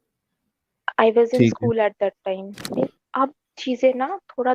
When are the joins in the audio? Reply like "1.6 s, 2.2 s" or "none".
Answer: 2.9 s